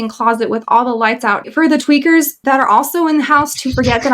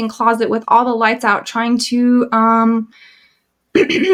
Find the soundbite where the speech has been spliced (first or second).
first